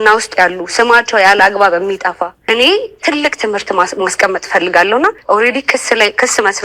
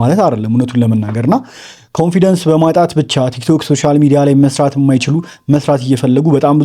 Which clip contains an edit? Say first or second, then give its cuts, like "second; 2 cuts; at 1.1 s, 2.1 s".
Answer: first; 2 cuts; at 2.5 s, 5.2 s